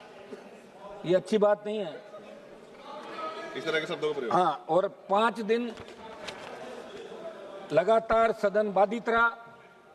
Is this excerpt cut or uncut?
uncut